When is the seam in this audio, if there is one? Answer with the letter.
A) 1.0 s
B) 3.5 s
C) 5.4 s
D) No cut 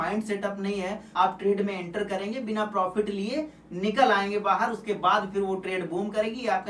A